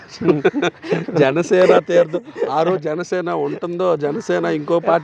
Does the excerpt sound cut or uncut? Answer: uncut